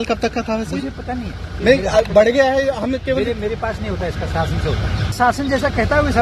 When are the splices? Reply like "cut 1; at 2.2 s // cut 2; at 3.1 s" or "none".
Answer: cut 1; at 1.6 s // cut 2; at 5.1 s